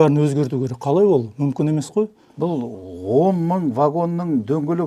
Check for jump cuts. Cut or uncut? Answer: uncut